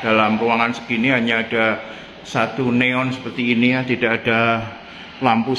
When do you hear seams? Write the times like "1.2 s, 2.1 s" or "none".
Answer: none